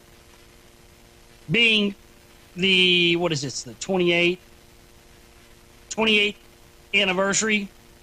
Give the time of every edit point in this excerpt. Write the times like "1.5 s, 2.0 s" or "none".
none